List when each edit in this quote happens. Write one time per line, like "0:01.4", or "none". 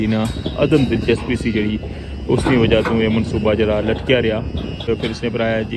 0:04.9